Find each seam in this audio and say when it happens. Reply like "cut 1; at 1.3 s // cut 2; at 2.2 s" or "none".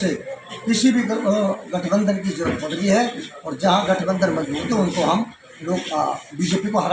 none